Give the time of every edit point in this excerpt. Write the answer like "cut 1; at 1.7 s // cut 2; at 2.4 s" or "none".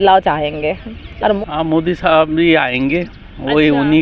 cut 1; at 1.4 s